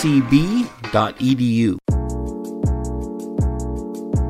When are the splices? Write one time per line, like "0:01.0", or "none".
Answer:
0:01.8